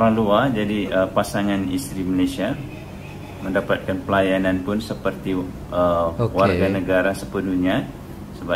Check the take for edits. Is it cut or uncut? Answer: uncut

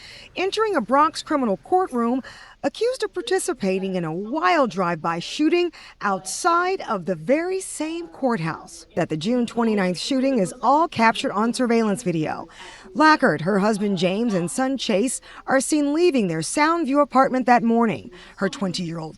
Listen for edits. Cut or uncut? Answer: cut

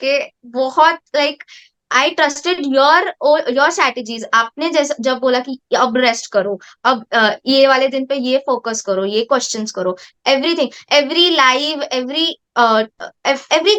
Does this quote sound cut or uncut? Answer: uncut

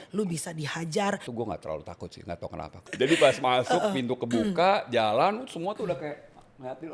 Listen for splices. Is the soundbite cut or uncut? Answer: cut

